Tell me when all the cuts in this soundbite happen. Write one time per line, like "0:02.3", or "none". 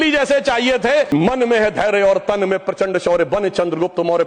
0:01.1